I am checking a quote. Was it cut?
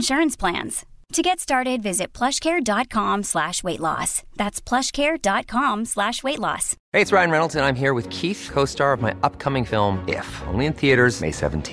yes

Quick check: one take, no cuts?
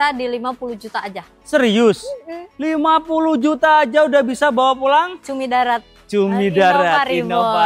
yes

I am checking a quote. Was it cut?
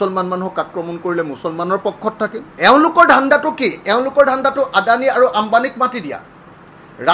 yes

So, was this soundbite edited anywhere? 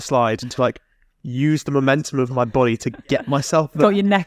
no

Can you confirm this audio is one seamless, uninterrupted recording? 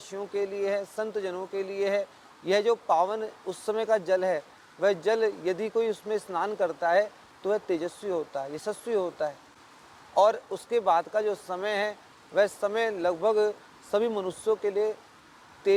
yes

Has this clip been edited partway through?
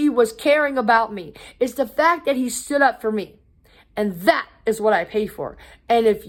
no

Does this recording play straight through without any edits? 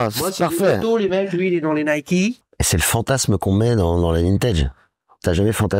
no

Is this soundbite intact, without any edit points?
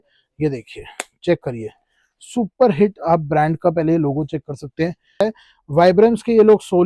no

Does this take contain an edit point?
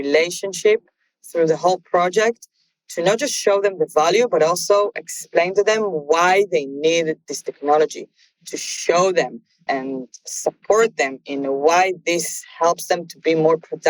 yes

